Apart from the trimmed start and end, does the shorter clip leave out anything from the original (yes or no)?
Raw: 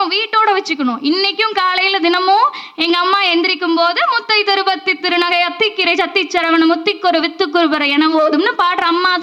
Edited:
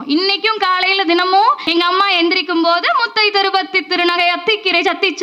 yes